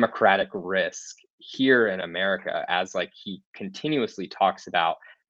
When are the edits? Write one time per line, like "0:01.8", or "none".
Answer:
none